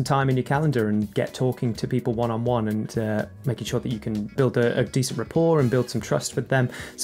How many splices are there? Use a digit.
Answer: 0